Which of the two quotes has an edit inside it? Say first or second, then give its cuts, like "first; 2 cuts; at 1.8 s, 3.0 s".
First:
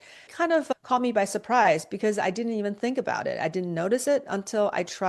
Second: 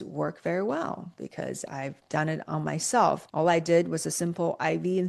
second; 1 cut; at 3.2 s